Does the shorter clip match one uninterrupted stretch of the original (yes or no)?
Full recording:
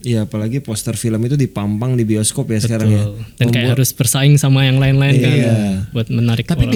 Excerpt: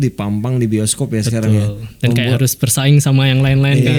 yes